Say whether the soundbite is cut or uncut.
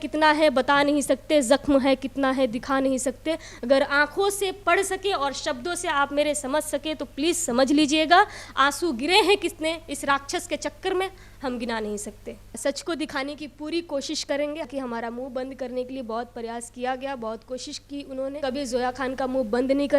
cut